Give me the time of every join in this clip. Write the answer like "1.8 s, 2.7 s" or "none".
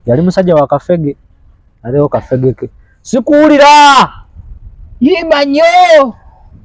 none